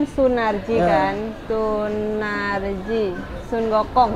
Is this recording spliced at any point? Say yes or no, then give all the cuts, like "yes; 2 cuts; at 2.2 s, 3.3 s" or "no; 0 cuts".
yes; 1 cut; at 1.4 s